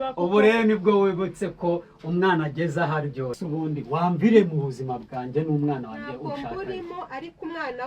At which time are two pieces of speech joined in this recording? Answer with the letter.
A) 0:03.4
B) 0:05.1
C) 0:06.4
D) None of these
A